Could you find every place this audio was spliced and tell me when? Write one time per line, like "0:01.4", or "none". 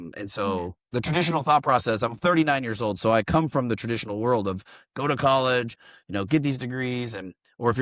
none